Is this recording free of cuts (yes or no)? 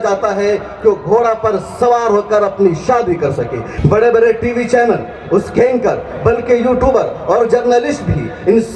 no